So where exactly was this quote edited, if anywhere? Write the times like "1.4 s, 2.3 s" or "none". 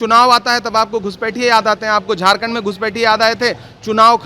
none